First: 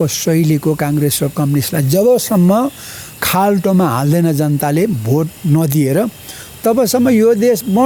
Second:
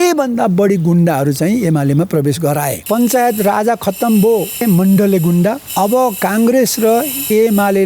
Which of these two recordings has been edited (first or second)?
second